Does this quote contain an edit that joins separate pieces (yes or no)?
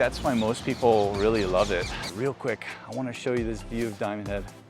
yes